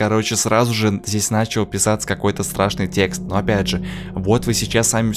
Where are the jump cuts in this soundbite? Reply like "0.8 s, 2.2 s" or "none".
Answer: none